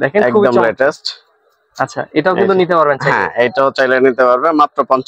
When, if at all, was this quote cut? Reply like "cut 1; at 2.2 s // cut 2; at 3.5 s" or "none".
none

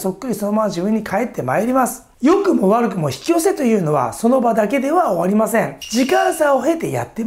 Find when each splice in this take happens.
cut 1; at 2.0 s

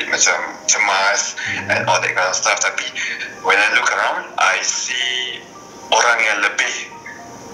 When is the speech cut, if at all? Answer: none

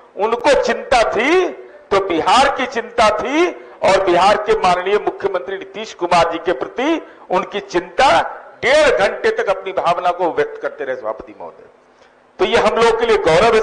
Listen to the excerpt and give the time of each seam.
none

